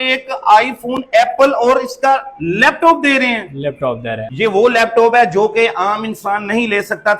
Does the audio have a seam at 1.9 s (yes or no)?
no